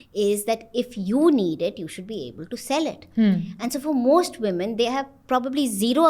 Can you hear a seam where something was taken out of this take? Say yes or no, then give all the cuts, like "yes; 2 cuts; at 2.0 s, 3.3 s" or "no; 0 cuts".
no; 0 cuts